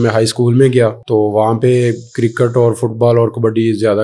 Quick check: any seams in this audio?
yes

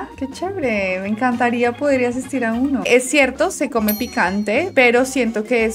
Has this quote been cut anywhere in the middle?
yes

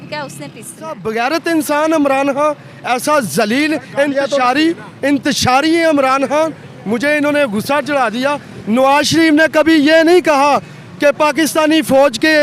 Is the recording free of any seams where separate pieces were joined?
no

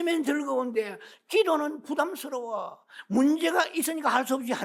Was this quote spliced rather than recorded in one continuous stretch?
no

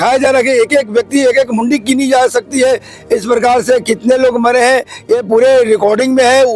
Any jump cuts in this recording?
yes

